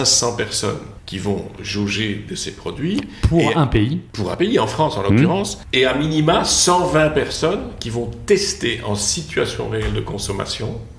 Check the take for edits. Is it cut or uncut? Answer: cut